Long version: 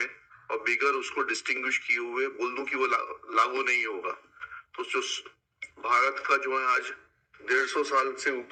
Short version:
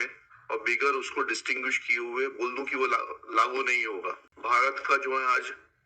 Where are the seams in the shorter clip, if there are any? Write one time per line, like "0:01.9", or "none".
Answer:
0:04.3